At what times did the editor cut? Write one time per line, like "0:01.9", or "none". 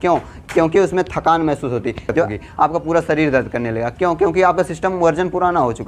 0:02.3